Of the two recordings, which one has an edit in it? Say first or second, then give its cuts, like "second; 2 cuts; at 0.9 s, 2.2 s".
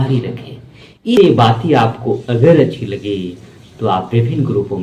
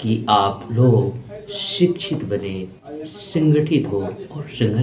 first; 1 cut; at 1.2 s